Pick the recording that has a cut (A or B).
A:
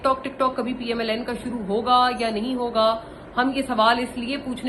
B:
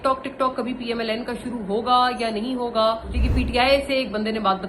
B